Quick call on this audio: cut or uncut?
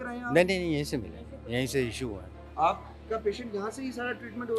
cut